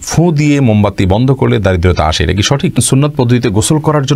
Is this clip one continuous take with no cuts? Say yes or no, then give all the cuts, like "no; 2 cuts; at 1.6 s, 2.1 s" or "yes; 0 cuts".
no; 1 cut; at 2.8 s